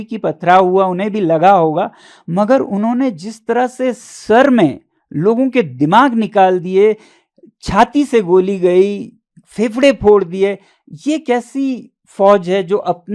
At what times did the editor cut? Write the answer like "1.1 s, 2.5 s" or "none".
none